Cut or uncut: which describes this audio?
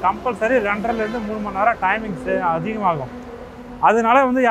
uncut